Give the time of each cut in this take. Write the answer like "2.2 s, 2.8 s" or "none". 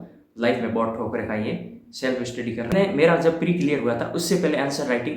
2.7 s